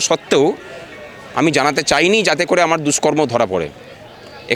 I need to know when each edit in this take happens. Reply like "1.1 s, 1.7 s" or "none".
none